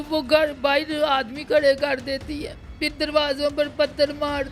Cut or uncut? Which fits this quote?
uncut